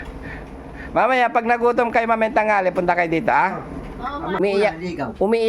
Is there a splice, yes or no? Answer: yes